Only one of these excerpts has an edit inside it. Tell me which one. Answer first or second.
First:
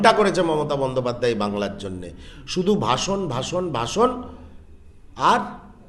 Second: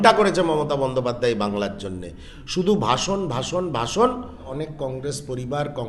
second